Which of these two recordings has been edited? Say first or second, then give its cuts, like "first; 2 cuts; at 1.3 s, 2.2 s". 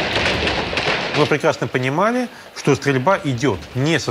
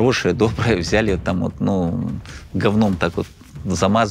first; 1 cut; at 1.2 s